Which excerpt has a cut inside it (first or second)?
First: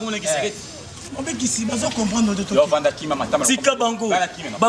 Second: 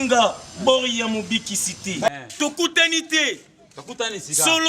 second